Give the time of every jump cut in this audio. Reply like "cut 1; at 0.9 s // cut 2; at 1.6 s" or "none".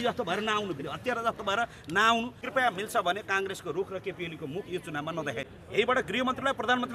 cut 1; at 2.4 s // cut 2; at 5.4 s